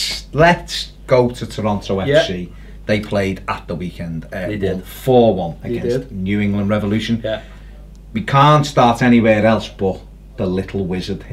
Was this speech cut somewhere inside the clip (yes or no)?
yes